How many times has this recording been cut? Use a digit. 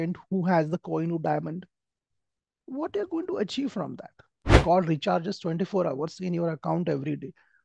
1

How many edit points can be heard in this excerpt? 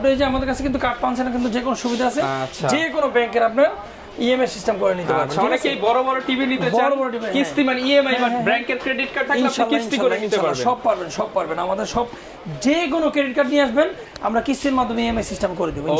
0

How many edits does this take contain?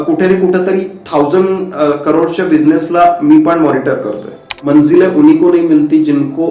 1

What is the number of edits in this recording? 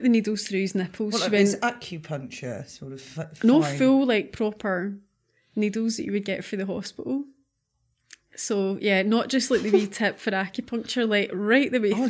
0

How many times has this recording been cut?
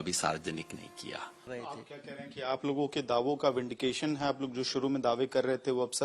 1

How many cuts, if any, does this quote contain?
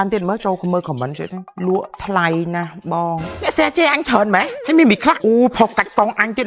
4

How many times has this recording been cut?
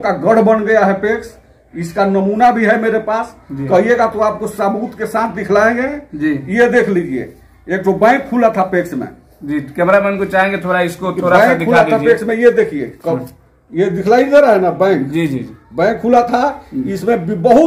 0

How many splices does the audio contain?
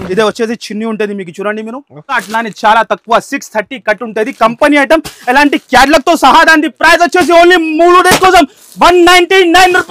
1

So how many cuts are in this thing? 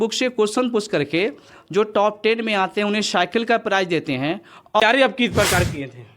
1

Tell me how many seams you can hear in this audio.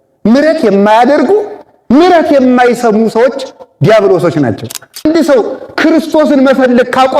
1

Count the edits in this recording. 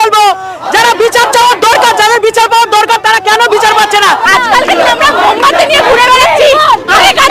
1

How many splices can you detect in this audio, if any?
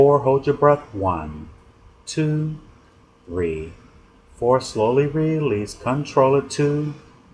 1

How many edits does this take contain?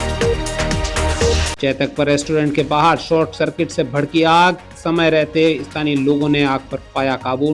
1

